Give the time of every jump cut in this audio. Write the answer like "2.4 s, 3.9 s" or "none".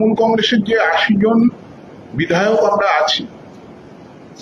none